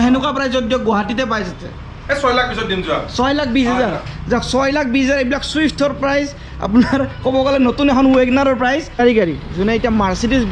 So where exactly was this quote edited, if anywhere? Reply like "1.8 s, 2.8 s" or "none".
9.0 s

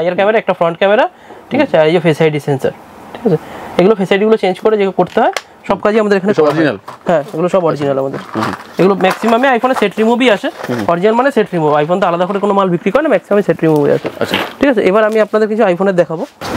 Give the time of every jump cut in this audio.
none

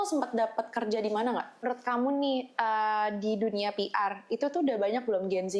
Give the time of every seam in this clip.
1.6 s

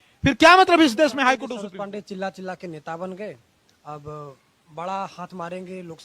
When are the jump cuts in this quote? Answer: 1.6 s

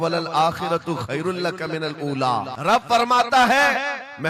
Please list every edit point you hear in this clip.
2.5 s

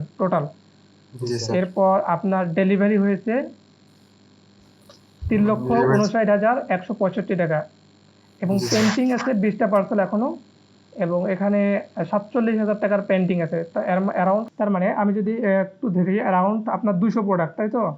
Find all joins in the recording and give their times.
14.5 s

